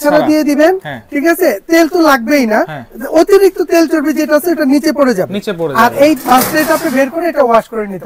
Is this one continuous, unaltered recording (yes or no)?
yes